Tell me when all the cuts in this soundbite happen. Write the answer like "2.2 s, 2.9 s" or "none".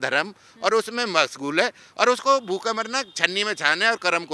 none